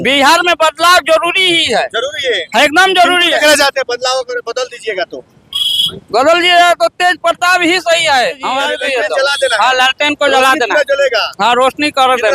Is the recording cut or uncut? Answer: cut